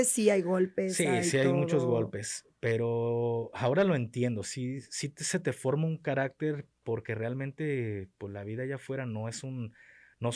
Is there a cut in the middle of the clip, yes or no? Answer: no